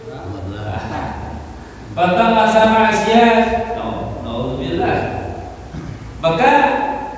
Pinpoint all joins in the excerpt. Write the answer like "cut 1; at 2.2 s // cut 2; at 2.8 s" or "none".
none